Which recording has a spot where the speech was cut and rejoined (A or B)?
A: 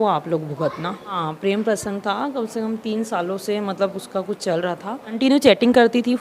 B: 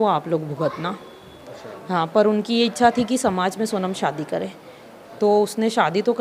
A